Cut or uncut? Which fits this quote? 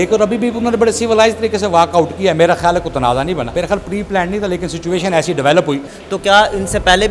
cut